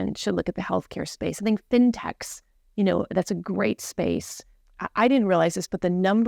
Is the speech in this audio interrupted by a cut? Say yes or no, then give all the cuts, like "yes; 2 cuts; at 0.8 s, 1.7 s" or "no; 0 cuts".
yes; 1 cut; at 4.5 s